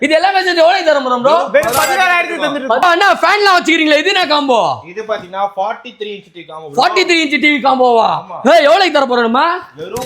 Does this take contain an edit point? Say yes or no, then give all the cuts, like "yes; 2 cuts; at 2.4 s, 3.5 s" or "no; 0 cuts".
yes; 1 cut; at 2.8 s